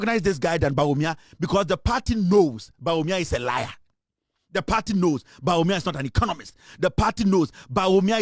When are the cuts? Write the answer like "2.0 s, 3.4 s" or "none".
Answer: none